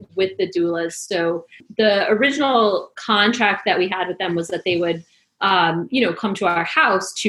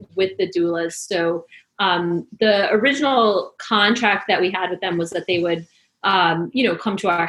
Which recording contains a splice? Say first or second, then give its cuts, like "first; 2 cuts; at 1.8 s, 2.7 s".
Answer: first; 1 cut; at 1.7 s